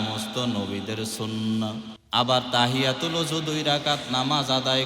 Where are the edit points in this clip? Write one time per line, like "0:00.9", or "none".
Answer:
0:02.0